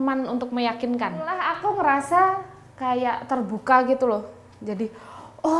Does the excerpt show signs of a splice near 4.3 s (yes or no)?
no